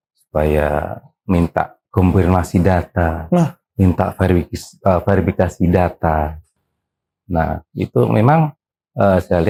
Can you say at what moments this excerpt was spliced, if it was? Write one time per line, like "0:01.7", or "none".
none